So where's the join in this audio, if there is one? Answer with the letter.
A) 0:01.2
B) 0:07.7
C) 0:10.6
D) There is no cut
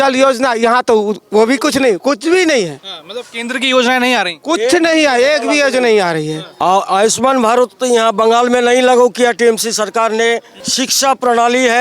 C